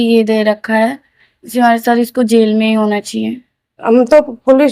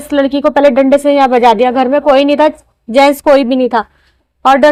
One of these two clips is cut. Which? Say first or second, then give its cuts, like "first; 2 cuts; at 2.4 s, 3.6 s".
first; 1 cut; at 3.7 s